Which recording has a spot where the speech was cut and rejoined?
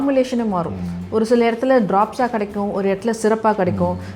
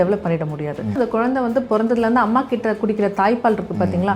second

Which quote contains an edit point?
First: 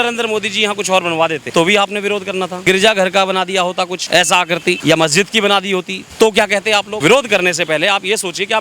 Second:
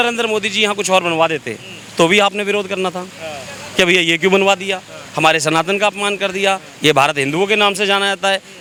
first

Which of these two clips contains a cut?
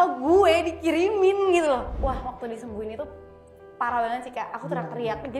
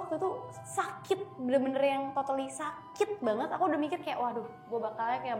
first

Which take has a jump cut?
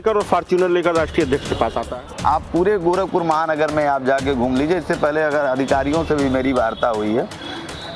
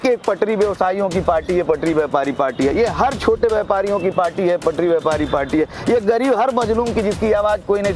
first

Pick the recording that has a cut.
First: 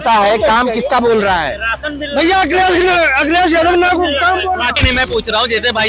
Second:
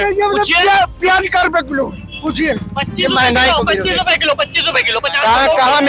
first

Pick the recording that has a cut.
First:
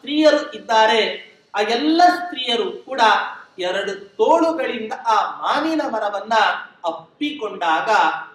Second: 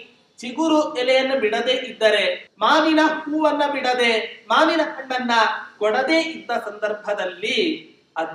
second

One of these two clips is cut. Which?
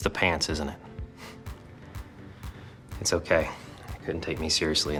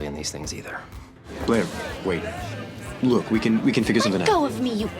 second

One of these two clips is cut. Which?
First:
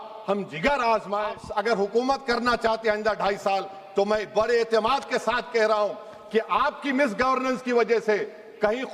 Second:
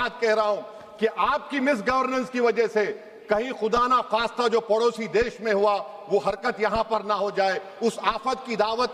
first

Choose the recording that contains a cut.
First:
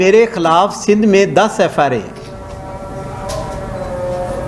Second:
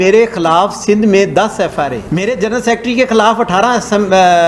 second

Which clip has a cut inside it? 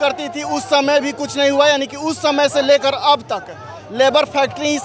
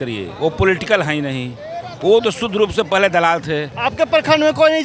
second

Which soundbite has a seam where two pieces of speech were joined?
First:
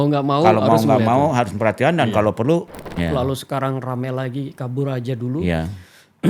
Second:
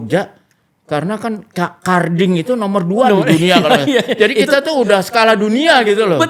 first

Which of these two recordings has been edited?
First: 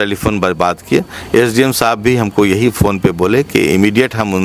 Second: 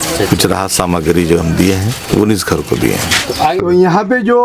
second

